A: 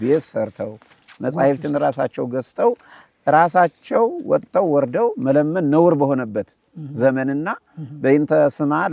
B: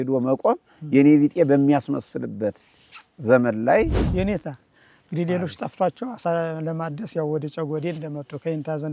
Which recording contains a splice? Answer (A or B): B